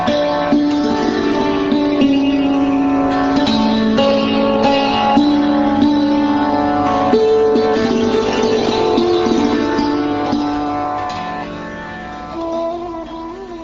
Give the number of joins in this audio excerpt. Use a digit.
1